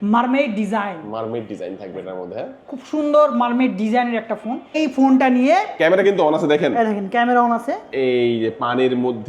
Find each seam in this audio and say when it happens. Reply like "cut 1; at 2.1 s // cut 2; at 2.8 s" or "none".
cut 1; at 4.8 s